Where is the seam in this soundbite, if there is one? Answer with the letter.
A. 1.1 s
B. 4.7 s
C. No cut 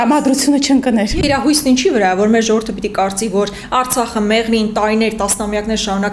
A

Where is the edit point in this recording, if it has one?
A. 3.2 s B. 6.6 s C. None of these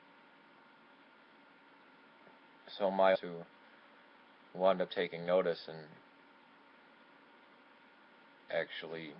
C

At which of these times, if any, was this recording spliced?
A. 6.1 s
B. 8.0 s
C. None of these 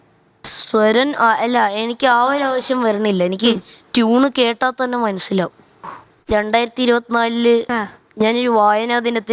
A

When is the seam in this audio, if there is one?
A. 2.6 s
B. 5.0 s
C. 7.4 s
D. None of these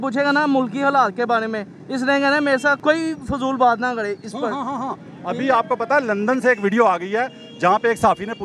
D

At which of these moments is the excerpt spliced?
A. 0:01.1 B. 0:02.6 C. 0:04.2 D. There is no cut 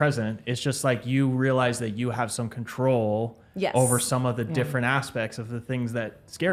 D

